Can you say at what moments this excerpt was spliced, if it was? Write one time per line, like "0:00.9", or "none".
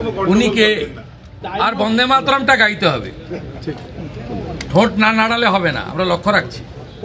0:01.4